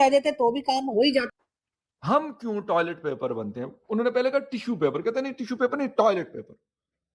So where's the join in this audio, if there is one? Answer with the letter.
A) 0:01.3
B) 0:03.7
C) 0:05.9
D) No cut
A